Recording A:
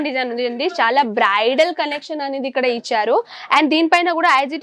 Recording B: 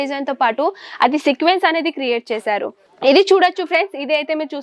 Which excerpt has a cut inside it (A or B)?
B